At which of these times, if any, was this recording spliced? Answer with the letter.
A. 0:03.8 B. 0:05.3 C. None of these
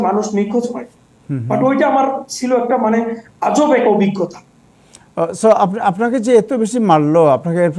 C